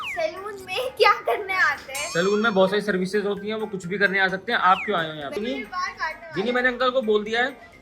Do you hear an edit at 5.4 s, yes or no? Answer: yes